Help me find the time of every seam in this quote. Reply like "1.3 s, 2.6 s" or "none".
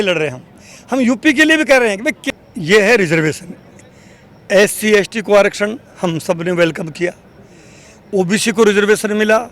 2.2 s